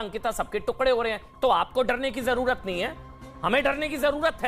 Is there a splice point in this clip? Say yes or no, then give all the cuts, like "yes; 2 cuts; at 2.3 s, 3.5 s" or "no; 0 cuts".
no; 0 cuts